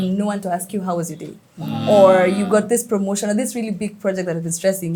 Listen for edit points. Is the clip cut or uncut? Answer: uncut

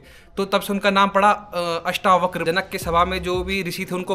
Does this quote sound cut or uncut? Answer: cut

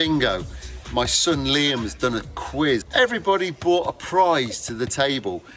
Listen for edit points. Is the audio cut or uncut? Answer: uncut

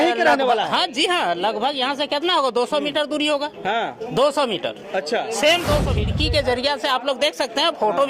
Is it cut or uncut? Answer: cut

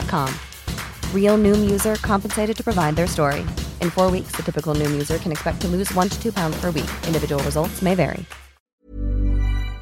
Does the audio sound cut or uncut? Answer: cut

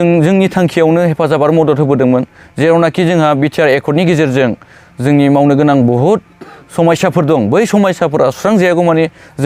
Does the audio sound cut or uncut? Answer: uncut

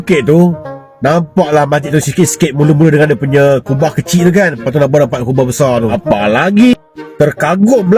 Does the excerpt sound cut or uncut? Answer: cut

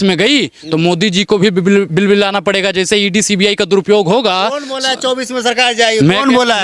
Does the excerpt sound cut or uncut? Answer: uncut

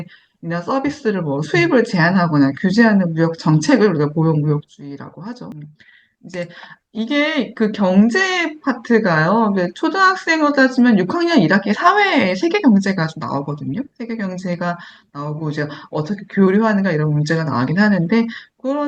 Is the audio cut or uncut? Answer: cut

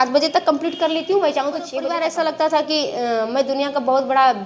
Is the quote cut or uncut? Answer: cut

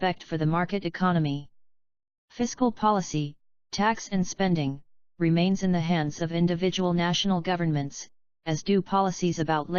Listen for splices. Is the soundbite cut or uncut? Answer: uncut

